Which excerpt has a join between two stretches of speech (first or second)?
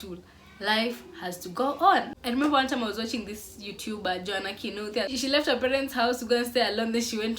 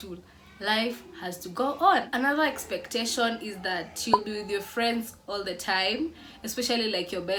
first